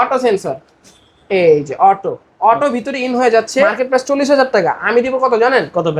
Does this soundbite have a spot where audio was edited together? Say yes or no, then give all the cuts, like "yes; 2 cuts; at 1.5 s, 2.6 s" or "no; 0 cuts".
yes; 1 cut; at 3.8 s